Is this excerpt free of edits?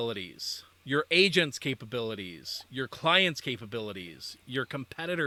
yes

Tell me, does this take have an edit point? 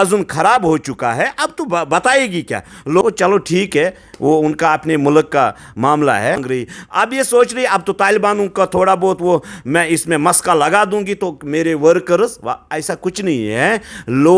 yes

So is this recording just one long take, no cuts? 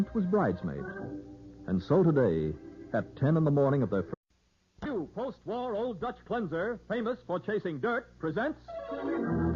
yes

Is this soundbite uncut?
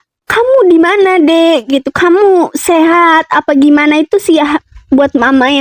yes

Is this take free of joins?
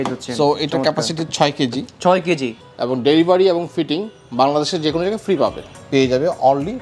no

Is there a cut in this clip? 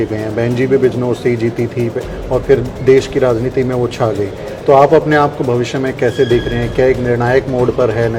no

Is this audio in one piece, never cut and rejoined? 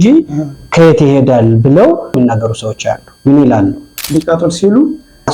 no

